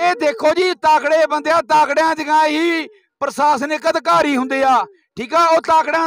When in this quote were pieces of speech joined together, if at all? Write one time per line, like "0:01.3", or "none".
none